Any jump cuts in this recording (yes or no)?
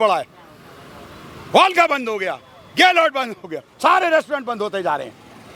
no